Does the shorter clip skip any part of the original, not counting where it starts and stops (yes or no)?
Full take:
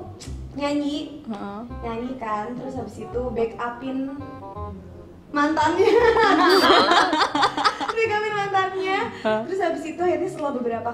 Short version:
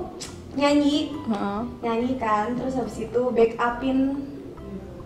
no